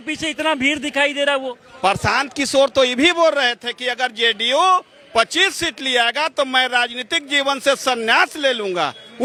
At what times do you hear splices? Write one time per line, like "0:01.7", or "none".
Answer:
none